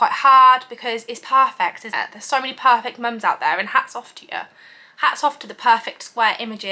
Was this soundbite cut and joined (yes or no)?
no